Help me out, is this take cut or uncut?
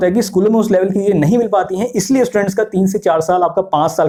uncut